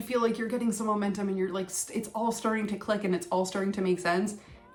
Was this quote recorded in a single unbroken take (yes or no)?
yes